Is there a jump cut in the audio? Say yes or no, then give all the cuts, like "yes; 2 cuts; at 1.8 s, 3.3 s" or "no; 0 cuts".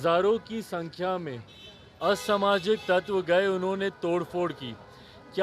no; 0 cuts